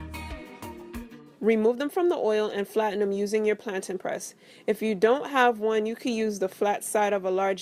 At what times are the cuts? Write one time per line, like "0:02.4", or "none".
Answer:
0:00.9